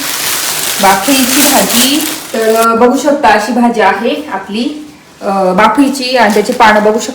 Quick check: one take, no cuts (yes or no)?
no